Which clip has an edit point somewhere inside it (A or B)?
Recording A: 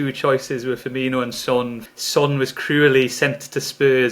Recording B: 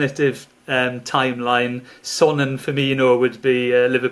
A